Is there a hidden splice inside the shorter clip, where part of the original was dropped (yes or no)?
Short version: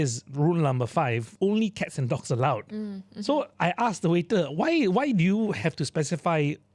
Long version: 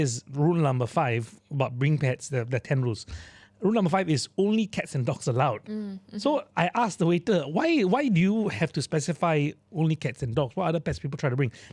yes